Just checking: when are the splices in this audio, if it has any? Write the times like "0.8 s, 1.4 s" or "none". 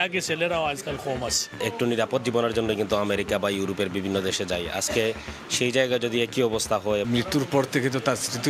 1.5 s, 7.0 s